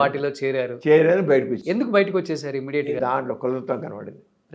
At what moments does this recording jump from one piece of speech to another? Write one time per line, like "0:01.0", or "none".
0:03.0